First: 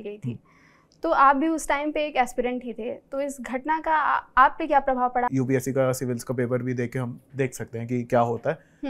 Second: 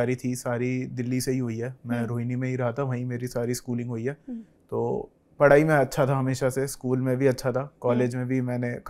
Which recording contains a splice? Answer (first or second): first